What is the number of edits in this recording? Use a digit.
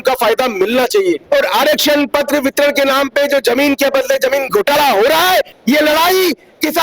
2